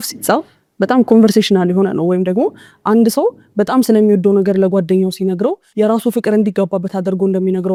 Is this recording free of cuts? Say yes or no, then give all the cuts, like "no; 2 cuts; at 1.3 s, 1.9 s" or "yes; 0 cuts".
yes; 0 cuts